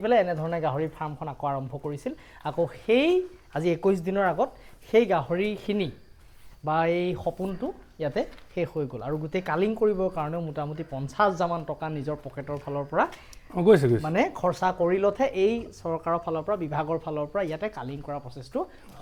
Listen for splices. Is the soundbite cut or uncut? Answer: uncut